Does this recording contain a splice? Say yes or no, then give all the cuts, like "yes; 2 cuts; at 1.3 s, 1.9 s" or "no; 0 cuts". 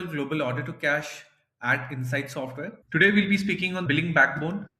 yes; 2 cuts; at 2.8 s, 3.8 s